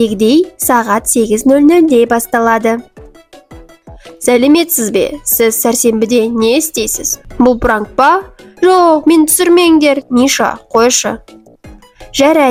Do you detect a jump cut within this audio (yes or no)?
no